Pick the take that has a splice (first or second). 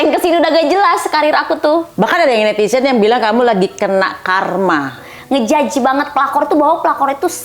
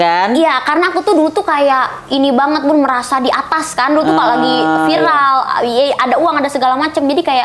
first